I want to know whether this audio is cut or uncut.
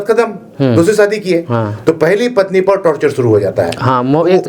uncut